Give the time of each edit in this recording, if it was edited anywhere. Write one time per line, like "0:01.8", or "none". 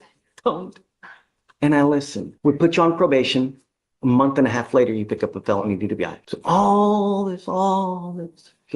0:02.2
0:06.3